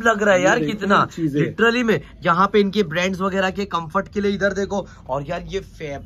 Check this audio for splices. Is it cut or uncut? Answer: uncut